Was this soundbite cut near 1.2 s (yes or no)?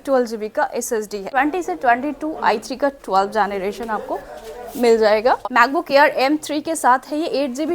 yes